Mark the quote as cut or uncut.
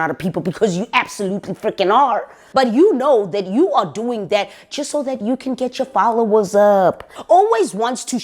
cut